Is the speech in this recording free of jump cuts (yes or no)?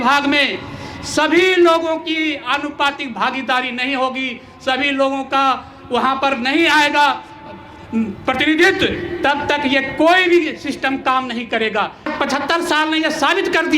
no